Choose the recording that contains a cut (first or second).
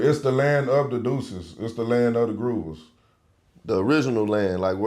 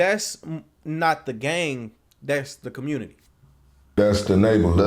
second